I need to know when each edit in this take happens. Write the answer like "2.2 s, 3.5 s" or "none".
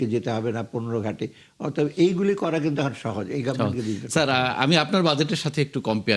none